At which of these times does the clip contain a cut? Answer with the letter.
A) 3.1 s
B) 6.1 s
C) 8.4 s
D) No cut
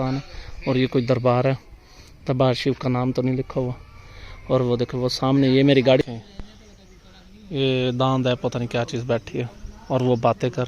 B